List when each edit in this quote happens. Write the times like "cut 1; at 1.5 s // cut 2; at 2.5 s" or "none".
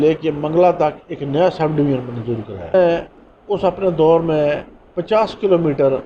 cut 1; at 2.7 s